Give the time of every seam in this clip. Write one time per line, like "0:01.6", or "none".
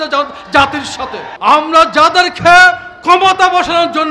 0:01.3